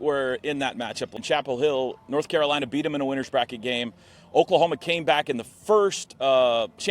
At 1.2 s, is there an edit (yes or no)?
yes